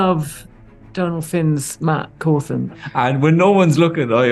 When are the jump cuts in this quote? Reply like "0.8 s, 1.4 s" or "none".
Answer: 2.7 s